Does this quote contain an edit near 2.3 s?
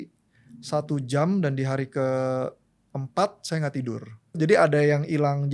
no; 1 cut; at 4.4 s

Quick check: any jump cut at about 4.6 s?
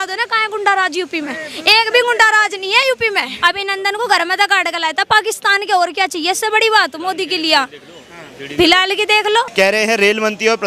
no; 2 cuts; at 3.3 s, 9.5 s

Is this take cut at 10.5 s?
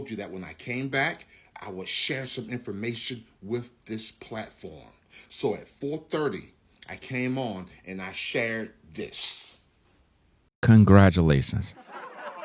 no; 0 cuts

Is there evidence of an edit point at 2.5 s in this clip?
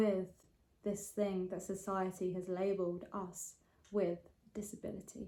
no; 0 cuts

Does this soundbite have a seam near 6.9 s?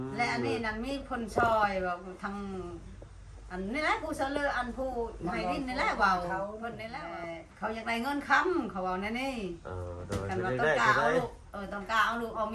yes; 1 cut; at 6.9 s

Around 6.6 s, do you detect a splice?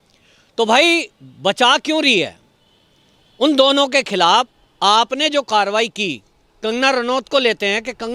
no; 0 cuts

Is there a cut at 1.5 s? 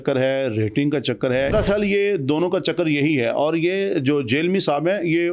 yes; 1 cut; at 1.5 s

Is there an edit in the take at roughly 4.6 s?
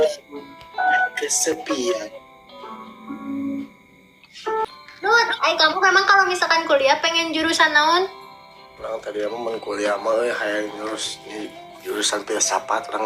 yes; 1 cut; at 4.6 s

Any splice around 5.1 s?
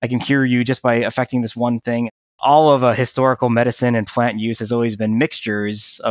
no; 1 cut; at 2.4 s

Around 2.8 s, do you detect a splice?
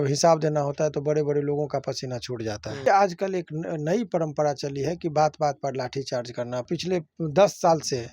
yes; 2 cuts; at 2.8 s, 6.6 s

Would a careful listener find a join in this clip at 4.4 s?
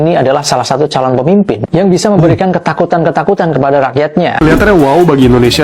yes; 1 cut; at 4.4 s

